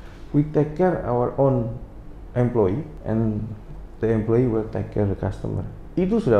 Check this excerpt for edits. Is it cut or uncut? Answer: cut